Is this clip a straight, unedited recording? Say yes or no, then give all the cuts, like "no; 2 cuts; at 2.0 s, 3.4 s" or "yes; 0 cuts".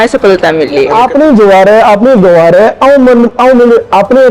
no; 1 cut; at 0.9 s